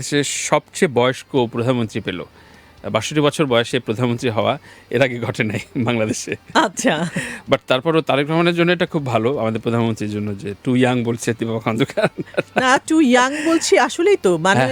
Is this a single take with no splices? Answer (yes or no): yes